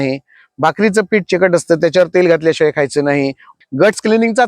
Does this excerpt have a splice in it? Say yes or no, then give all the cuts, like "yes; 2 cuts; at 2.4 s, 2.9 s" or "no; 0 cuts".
yes; 1 cut; at 3.4 s